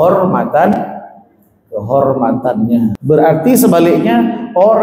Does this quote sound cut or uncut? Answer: cut